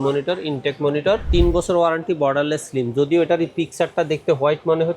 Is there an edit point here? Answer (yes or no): yes